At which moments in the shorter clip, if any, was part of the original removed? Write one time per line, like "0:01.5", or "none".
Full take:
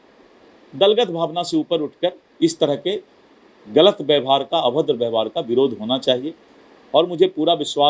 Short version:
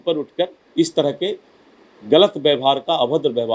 none